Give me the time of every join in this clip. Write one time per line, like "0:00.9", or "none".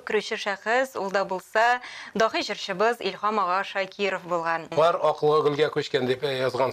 0:04.6

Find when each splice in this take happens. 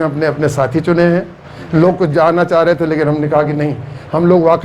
none

